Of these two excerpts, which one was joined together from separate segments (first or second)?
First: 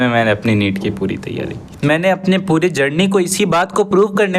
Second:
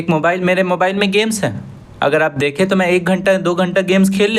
first